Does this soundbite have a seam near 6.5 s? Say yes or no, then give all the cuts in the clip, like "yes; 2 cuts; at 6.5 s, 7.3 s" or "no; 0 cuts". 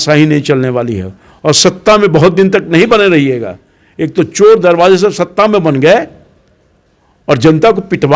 no; 0 cuts